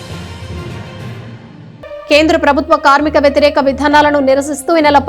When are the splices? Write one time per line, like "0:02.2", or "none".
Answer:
0:02.0